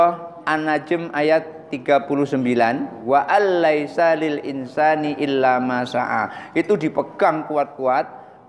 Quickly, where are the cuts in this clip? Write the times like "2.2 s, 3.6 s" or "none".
3.0 s